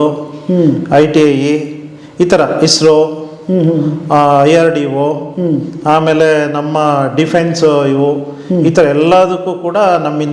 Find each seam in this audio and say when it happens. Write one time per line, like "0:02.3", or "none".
none

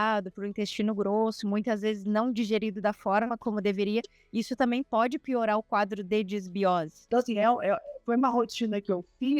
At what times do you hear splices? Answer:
0:07.0

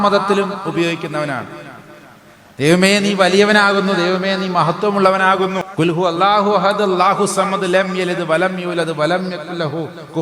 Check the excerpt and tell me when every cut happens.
0:05.6

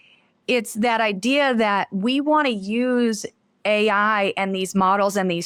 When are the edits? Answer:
none

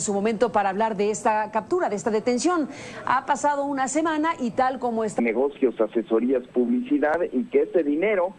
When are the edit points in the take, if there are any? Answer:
none

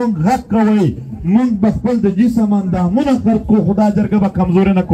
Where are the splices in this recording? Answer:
none

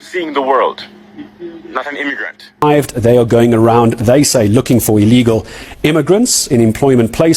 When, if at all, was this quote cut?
0:02.6

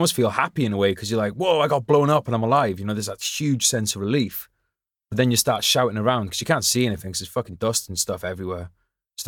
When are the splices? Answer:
none

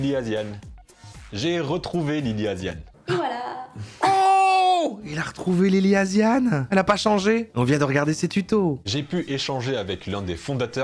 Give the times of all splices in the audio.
0:06.6
0:07.6
0:08.8

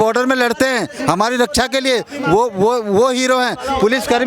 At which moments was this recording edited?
none

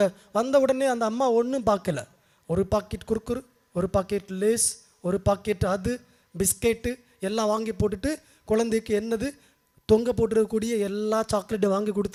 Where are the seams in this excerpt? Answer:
none

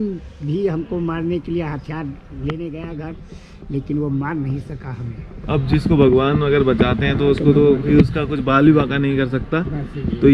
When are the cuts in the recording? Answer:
none

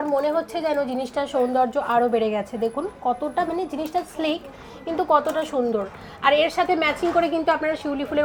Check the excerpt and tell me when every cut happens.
none

